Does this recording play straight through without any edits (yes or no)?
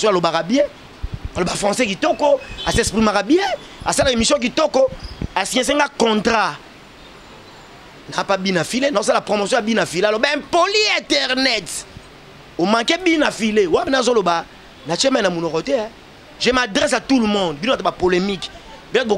yes